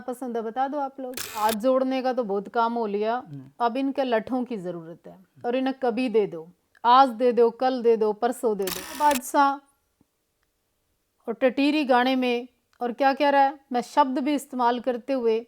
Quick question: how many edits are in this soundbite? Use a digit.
2